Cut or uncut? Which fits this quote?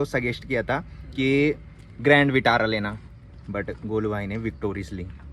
uncut